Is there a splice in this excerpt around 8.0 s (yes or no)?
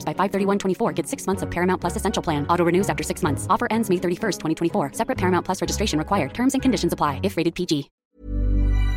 yes